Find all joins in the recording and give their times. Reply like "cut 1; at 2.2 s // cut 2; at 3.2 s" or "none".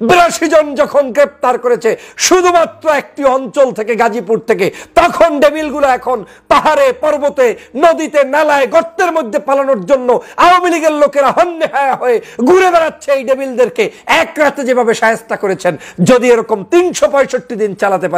none

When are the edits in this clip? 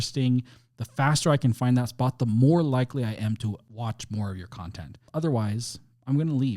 cut 1; at 3.7 s // cut 2; at 5.0 s

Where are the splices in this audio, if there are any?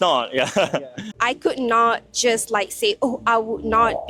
cut 1; at 1.0 s

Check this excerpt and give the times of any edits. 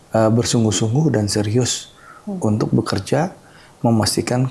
none

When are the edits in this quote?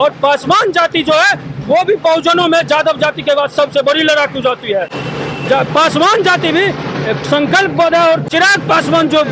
none

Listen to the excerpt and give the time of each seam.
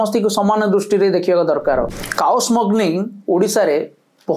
cut 1; at 2.0 s

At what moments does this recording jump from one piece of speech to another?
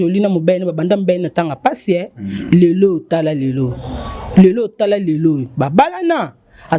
none

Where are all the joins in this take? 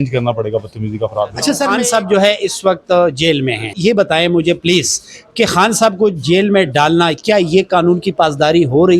cut 1; at 1.6 s // cut 2; at 3.6 s

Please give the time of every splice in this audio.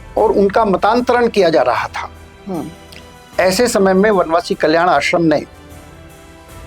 none

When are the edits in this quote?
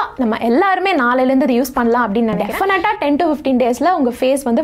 cut 1; at 2.5 s

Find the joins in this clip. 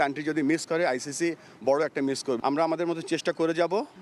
none

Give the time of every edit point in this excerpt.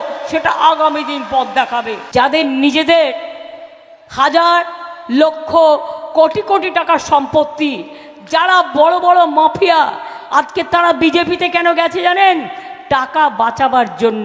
cut 1; at 2.0 s

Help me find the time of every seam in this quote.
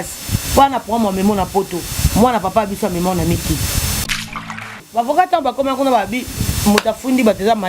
cut 1; at 4.5 s

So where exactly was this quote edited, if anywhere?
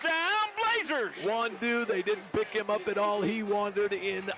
none

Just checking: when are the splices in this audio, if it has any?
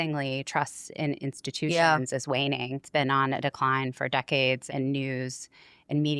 cut 1; at 2.8 s // cut 2; at 4.6 s

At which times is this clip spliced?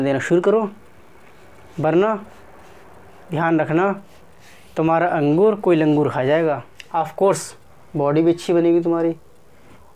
cut 1; at 6.7 s

